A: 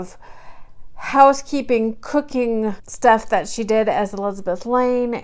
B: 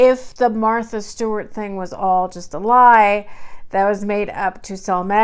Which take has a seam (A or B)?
A